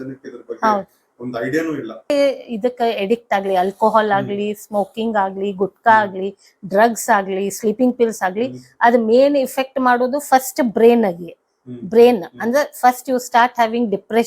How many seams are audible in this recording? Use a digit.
1